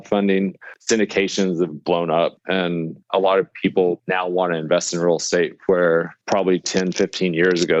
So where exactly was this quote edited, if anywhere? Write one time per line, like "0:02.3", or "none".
0:02.6
0:04.1
0:06.2